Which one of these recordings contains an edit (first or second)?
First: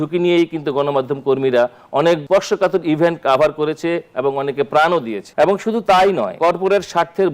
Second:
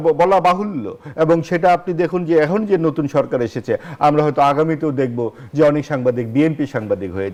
first